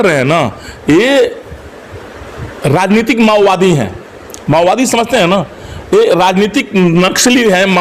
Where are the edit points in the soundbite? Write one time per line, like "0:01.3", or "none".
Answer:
none